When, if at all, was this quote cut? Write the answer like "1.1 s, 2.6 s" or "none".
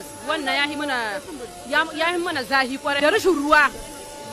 3.0 s